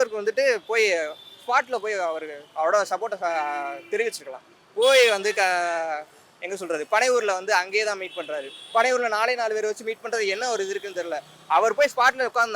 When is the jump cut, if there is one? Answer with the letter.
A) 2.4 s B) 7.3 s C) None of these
C